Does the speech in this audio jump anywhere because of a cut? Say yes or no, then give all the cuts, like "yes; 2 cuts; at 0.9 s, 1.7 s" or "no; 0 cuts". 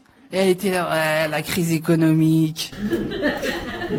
no; 0 cuts